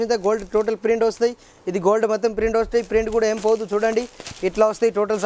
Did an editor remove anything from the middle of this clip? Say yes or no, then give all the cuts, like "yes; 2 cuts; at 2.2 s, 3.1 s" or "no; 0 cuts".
no; 0 cuts